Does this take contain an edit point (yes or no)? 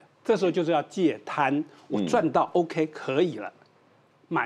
no